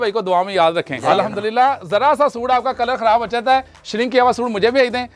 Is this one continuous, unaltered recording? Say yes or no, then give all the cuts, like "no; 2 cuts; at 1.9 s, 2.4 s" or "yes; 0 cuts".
no; 1 cut; at 1.0 s